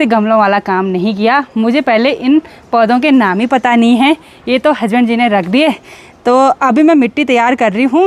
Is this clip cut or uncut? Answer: uncut